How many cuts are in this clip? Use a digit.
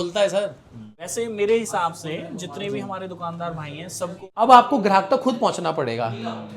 2